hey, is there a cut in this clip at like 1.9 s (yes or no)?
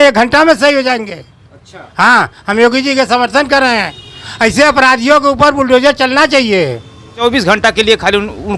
no